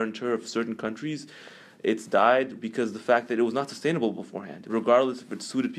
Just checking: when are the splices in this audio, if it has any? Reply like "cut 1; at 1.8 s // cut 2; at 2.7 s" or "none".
cut 1; at 2.6 s // cut 2; at 4.7 s